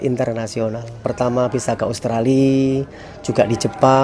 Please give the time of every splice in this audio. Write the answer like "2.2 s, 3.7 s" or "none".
1.0 s

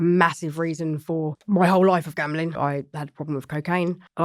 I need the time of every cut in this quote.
1.4 s, 2.6 s

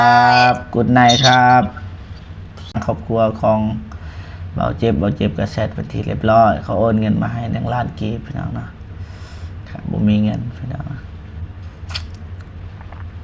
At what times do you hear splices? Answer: 2.8 s

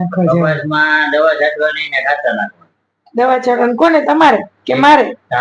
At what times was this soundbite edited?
none

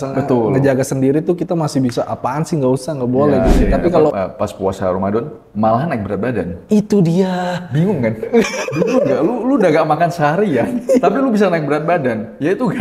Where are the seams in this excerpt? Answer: 4.1 s

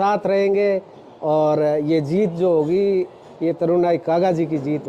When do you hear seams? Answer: none

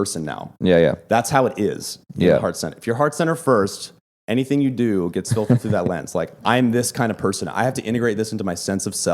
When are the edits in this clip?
none

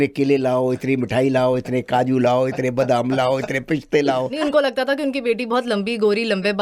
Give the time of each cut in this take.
4.4 s

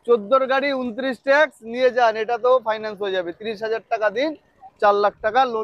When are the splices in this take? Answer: none

